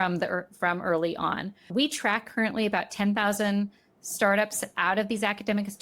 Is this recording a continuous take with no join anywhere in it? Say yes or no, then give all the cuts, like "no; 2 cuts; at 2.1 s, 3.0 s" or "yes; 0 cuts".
no; 1 cut; at 1.7 s